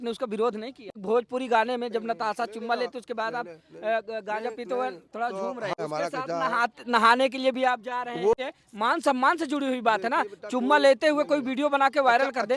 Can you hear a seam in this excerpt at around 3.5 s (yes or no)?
no